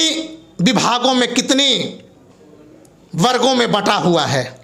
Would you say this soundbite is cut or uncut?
uncut